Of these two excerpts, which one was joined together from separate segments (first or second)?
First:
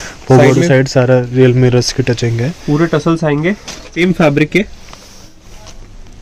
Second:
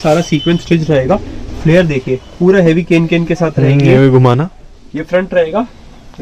first